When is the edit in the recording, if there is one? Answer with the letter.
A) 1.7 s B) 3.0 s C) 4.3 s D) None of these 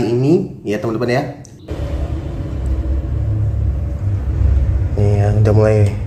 A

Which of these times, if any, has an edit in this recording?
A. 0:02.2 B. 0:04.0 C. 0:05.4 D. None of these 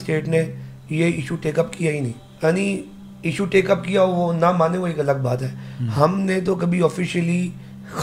A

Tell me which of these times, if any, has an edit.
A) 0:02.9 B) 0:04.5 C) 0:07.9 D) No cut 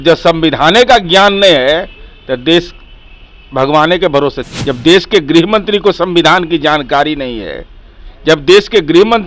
B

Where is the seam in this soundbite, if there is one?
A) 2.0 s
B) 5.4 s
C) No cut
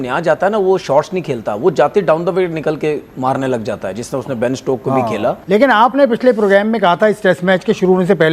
B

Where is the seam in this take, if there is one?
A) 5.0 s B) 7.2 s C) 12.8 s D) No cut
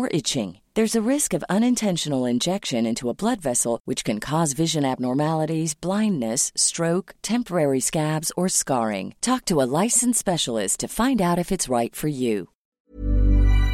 C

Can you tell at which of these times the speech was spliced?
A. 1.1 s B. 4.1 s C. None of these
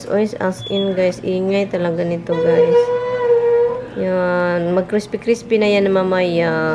C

